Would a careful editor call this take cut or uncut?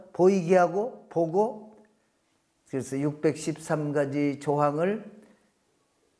uncut